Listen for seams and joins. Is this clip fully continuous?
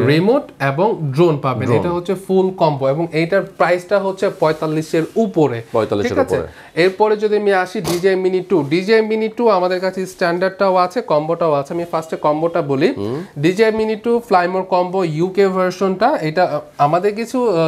yes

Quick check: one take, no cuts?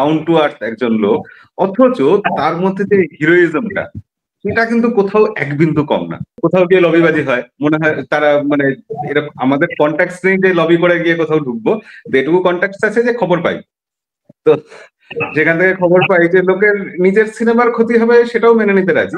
no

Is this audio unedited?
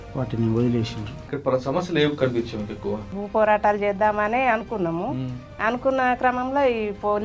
no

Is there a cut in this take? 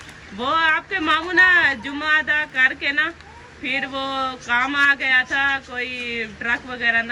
no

